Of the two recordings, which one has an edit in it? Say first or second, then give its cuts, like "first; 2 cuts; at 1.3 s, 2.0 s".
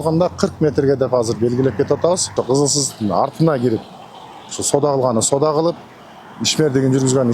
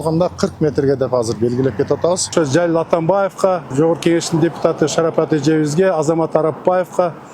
second; 2 cuts; at 2.3 s, 3.7 s